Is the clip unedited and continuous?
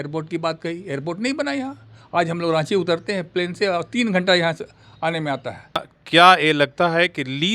no; 1 cut; at 5.9 s

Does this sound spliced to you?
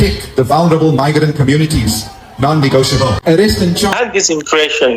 yes; 1 cut; at 3.9 s

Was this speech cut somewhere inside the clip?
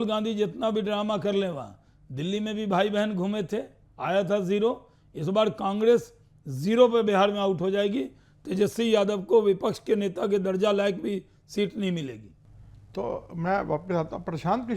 no; 0 cuts

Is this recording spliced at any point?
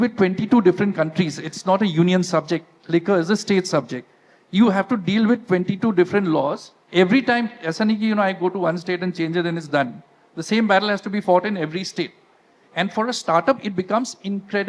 no; 0 cuts

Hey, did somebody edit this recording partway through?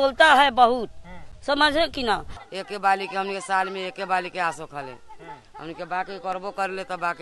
yes; 1 cut; at 2.4 s

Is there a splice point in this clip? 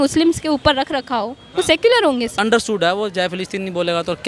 yes; 1 cut; at 2.3 s

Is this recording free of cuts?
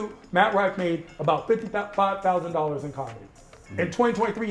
yes; 0 cuts

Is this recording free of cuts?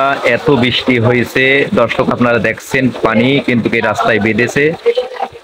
yes; 0 cuts

